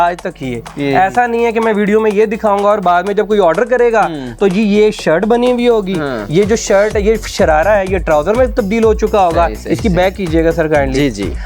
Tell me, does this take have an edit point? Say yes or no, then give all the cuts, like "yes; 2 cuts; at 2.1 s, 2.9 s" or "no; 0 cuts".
no; 0 cuts